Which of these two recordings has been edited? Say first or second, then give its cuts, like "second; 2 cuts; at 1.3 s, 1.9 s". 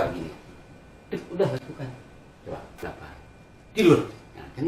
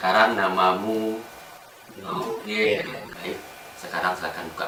first; 1 cut; at 2.7 s